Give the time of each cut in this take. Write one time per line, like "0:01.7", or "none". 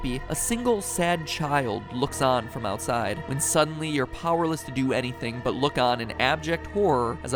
none